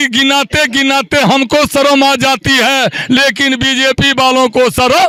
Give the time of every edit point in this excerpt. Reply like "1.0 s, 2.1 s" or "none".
none